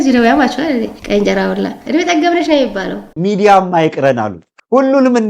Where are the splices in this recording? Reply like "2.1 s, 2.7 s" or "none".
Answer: 1.8 s, 3.1 s